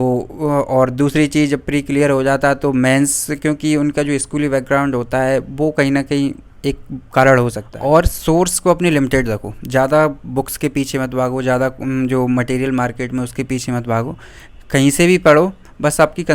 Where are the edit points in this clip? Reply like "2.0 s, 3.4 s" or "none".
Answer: 7.7 s